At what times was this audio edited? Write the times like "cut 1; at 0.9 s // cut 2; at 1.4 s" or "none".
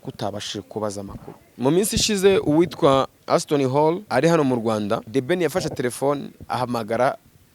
cut 1; at 1.4 s // cut 2; at 3.2 s // cut 3; at 4.0 s // cut 4; at 5.1 s

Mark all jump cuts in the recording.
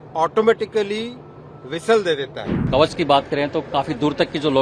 cut 1; at 2.5 s

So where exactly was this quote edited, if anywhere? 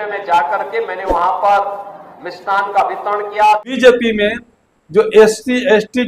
cut 1; at 3.8 s

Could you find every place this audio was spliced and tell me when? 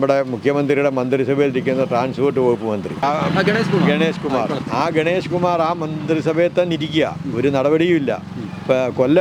none

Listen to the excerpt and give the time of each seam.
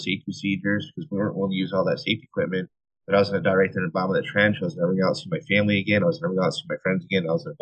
none

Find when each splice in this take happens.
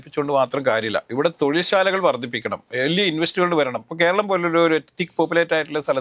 none

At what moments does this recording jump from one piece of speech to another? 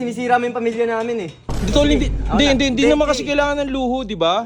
cut 1; at 1.4 s

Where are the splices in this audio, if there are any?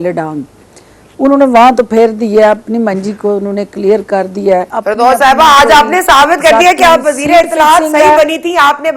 cut 1; at 4.7 s

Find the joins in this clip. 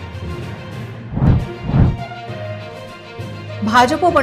cut 1; at 0.9 s

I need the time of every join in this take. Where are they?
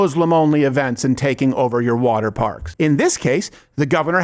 cut 1; at 2.6 s

